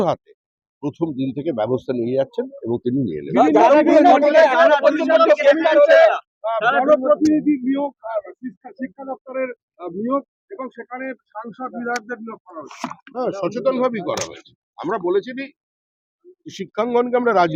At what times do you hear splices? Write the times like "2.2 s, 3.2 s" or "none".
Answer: none